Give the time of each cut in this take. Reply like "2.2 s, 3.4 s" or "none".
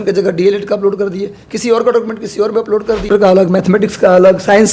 3.1 s